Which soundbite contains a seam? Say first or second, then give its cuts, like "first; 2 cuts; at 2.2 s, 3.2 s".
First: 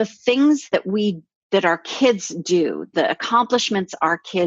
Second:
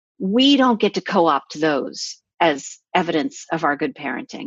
first; 2 cuts; at 1.0 s, 2.9 s